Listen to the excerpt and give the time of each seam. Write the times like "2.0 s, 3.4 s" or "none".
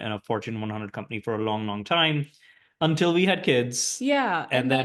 none